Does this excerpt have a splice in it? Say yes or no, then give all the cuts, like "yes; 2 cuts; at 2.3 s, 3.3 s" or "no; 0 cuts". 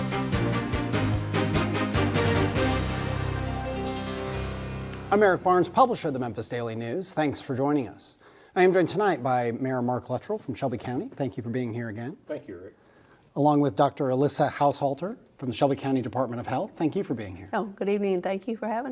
no; 0 cuts